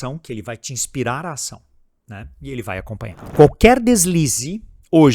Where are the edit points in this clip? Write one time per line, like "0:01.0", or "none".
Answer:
0:03.2